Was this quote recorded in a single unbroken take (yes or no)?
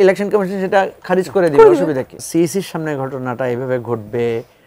no